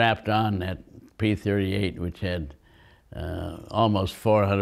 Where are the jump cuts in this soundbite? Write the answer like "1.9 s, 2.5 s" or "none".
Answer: none